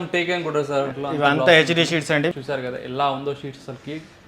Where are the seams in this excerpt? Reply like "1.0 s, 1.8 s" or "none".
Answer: 1.0 s, 2.3 s